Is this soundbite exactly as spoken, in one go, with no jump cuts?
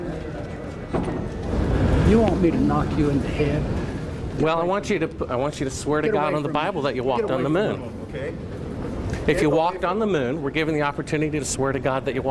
no; 1 cut; at 1.5 s

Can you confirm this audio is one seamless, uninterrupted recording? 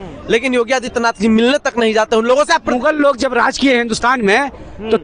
no; 1 cut; at 2.8 s

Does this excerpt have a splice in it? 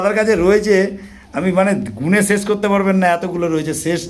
no; 0 cuts

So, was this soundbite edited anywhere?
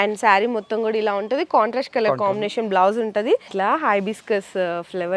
yes; 1 cut; at 3.5 s

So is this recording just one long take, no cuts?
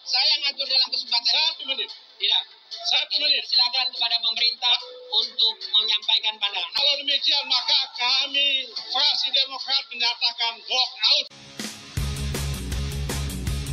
no; 2 cuts; at 6.8 s, 11.3 s

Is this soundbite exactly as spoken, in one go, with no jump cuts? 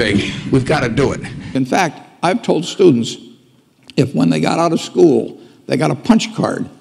no; 1 cut; at 1.4 s

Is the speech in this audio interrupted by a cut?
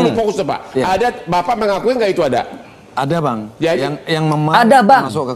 no; 0 cuts

